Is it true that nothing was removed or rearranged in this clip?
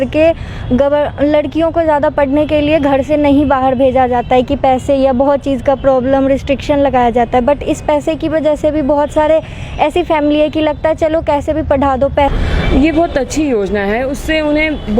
no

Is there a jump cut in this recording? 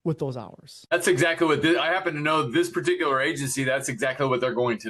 yes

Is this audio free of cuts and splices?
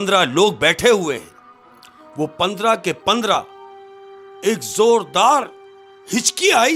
yes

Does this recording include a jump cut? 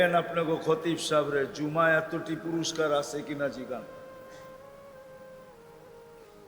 yes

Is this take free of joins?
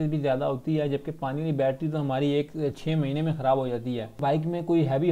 no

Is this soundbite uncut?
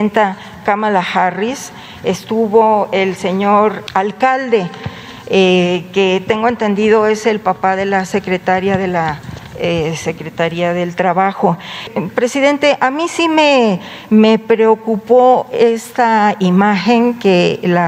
no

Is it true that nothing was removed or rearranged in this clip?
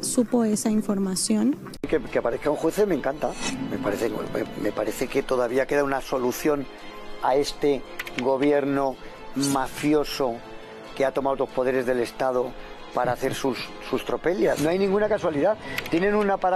no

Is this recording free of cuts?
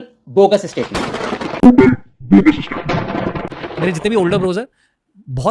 yes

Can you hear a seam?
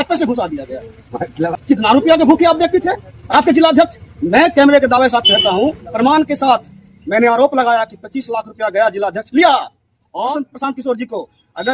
yes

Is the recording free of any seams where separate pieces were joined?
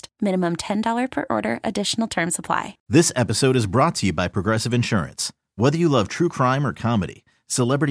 no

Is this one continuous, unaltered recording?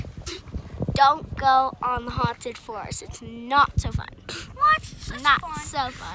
yes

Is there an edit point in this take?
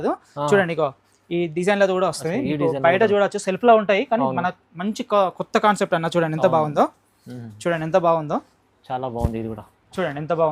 no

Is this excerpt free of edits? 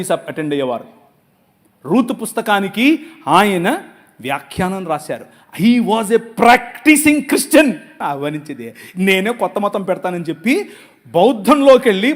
no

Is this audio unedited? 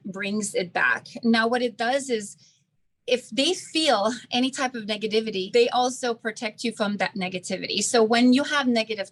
yes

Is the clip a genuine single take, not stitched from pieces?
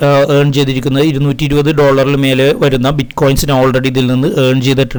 yes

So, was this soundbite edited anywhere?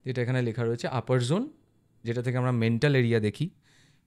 no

